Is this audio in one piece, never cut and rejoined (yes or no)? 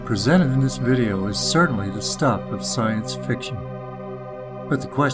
no